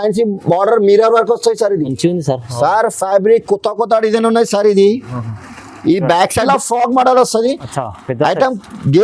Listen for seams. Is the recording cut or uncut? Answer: cut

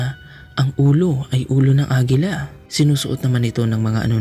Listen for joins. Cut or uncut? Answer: cut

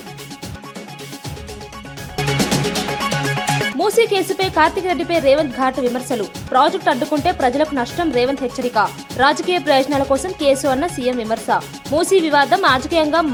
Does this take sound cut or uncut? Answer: uncut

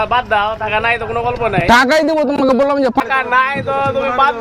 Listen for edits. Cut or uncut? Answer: cut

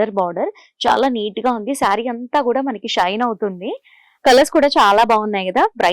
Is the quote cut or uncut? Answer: cut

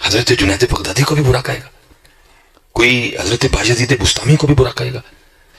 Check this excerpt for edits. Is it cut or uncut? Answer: uncut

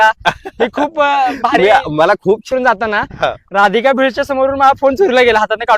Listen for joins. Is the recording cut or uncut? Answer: cut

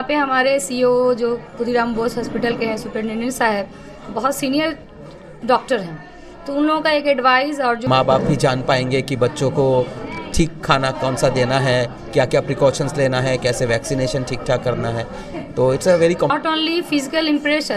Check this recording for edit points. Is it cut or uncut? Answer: cut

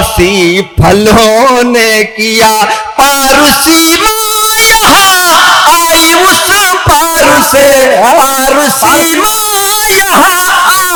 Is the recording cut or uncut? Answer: uncut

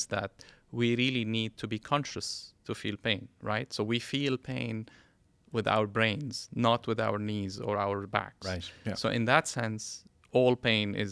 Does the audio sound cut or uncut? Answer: uncut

